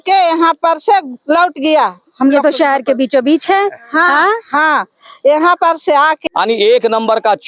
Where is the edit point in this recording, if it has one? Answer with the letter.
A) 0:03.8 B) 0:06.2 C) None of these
B